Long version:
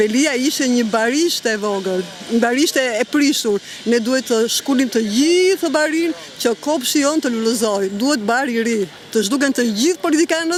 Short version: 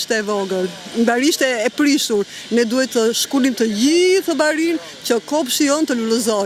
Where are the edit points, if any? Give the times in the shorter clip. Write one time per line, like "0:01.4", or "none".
none